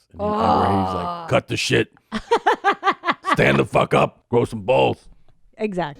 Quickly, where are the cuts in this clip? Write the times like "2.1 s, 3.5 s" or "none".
4.2 s